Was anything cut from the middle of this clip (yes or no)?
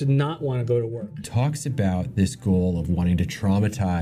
yes